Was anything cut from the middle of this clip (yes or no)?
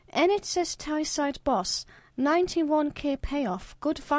no